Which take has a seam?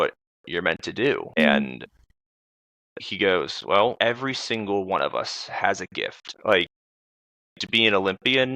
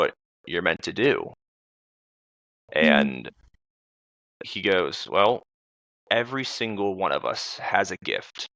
first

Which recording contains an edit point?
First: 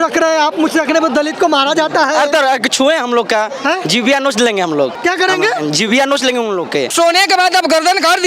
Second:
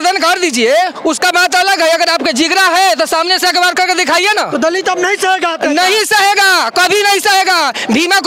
first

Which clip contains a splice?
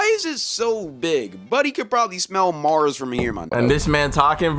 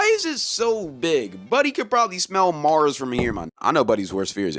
first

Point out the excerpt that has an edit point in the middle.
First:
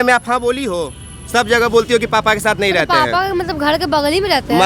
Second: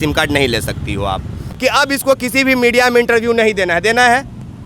second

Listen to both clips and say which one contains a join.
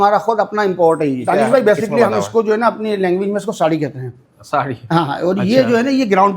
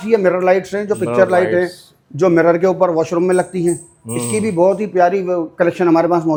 first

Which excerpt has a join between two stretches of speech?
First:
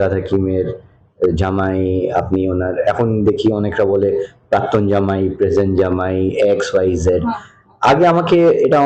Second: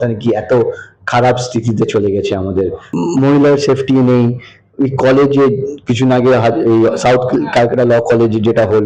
second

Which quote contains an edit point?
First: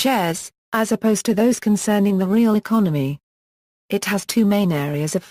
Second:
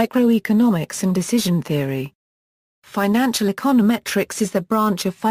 second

